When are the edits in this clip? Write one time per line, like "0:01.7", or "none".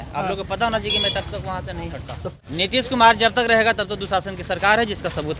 0:02.4